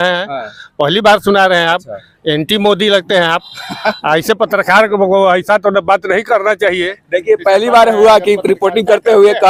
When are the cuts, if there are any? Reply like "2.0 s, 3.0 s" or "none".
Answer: none